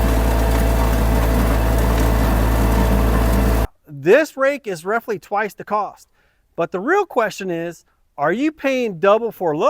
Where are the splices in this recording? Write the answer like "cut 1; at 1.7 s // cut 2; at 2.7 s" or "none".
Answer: cut 1; at 3.7 s